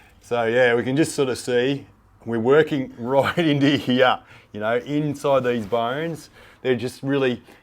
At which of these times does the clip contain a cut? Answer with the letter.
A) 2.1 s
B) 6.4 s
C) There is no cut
B